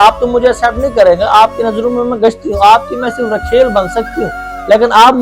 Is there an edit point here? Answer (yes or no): no